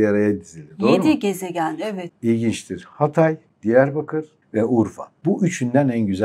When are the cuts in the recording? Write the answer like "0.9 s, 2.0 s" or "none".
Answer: 2.0 s, 3.5 s, 4.4 s, 5.1 s